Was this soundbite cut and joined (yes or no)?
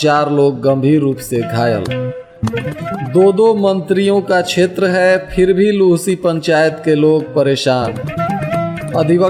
no